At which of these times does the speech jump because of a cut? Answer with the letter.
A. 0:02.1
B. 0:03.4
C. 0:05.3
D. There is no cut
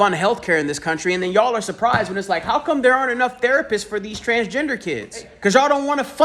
C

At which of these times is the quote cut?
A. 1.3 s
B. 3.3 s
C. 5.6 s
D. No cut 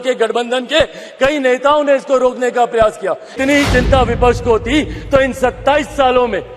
B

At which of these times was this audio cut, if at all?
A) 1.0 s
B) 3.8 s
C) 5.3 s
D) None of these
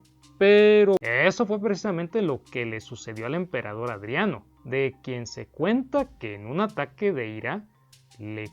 A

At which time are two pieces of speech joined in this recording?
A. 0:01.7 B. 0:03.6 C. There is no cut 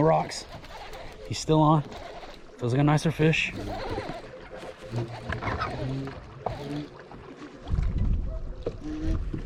C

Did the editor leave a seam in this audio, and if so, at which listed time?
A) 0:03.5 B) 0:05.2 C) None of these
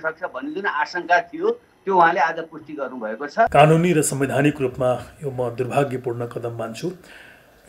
A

